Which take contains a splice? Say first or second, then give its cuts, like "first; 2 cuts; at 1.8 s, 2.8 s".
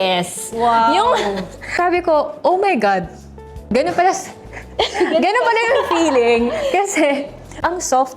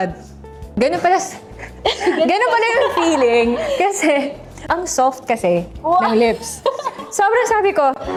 first; 1 cut; at 1.6 s